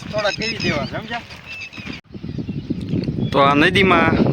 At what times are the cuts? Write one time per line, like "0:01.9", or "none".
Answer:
0:02.0